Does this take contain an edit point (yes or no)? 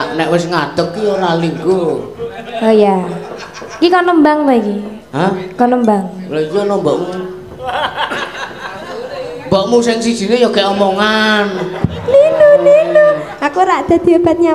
no